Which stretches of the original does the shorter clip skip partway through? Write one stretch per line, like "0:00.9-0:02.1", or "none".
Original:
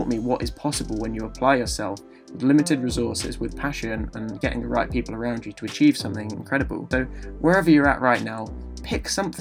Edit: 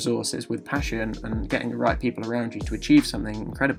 none